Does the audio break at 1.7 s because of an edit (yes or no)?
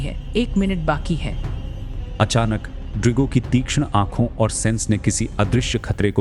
yes